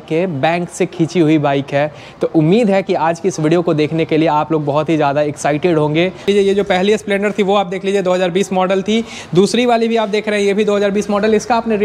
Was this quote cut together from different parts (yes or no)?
yes